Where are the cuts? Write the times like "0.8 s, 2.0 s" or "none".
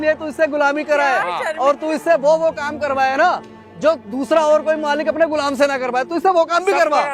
none